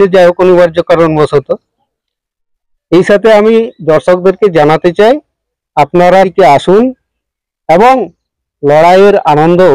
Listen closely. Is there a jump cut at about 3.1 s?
no; 1 cut; at 6.3 s

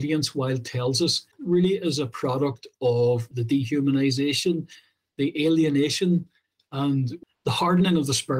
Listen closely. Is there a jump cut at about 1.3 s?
yes; 3 cuts; at 1.3 s, 3.3 s, 7.2 s

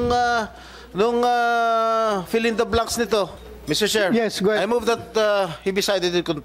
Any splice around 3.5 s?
yes; 1 cut; at 3.5 s

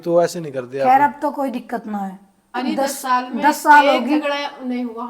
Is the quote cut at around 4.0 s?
no; 1 cut; at 2.5 s

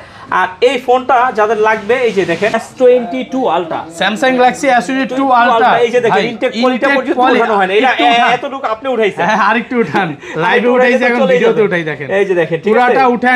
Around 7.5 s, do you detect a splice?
no; 1 cut; at 2.6 s

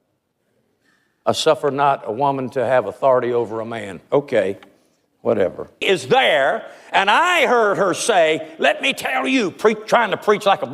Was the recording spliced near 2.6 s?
no; 1 cut; at 5.8 s

